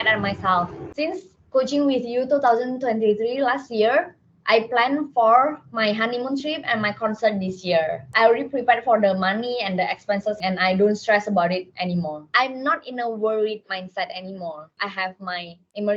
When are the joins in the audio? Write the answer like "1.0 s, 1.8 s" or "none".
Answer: 0.9 s, 8.1 s, 10.4 s, 12.3 s, 14.7 s